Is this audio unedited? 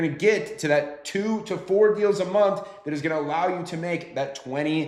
yes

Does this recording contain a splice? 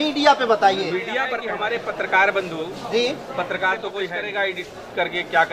yes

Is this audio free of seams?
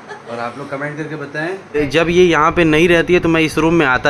no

